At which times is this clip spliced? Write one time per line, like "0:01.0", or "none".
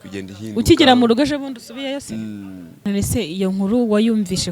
0:02.8